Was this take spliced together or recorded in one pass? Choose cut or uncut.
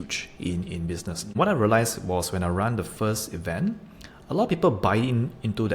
cut